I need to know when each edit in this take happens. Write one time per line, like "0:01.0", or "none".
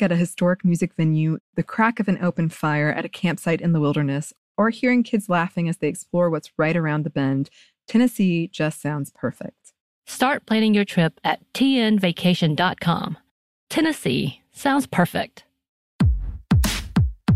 0:15.9